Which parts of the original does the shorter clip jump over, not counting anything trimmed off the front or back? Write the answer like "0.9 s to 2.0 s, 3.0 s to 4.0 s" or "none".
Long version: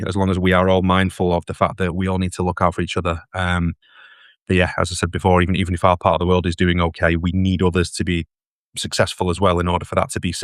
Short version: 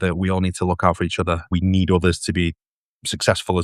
3.3 s to 7.2 s